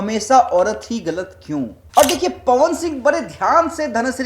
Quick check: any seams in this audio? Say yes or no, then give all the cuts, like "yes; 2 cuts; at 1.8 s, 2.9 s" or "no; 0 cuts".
yes; 1 cut; at 1.8 s